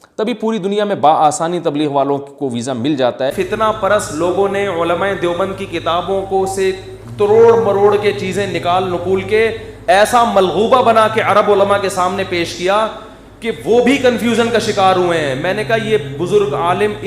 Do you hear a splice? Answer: yes; 1 cut; at 3.3 s

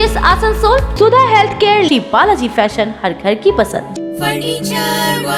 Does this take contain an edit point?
no; 0 cuts

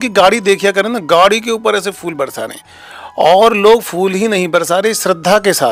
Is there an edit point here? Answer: no; 0 cuts

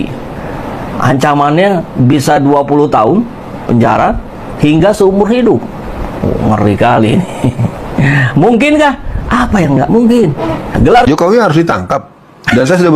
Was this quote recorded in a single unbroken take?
no; 1 cut; at 11.0 s

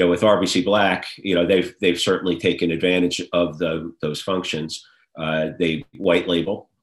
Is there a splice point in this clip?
no; 0 cuts

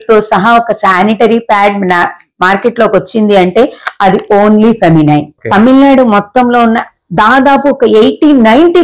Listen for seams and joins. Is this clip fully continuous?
no; 1 cut; at 5.3 s

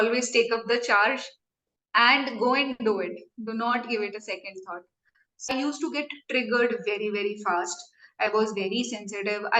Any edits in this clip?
yes; 1 cut; at 5.5 s

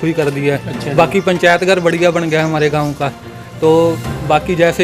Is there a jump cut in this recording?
no; 0 cuts

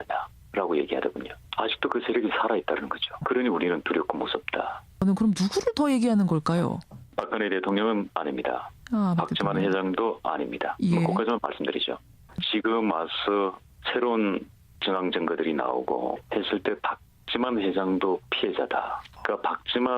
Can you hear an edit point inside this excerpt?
yes; 1 cut; at 11.3 s

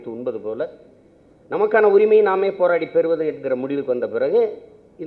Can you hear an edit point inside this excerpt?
no; 0 cuts

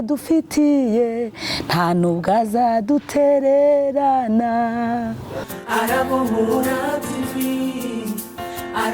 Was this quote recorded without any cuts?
no; 1 cut; at 5.5 s

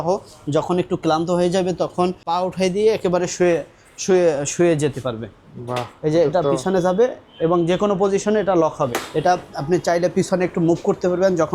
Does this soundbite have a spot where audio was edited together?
yes; 2 cuts; at 2.2 s, 9.0 s

